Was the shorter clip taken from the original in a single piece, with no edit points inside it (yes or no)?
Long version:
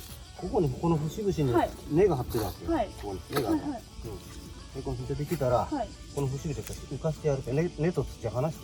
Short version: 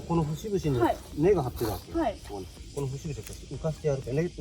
no